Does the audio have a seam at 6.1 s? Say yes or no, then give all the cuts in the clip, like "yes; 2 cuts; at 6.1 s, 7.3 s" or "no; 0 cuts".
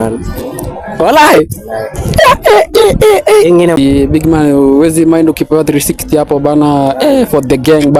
no; 1 cut; at 3.8 s